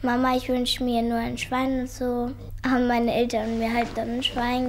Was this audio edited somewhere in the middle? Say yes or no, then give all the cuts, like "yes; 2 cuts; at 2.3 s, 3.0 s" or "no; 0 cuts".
yes; 1 cut; at 2.5 s